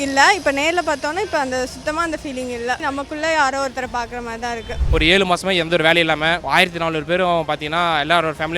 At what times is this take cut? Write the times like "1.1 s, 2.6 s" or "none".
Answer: 2.8 s, 4.8 s, 6.4 s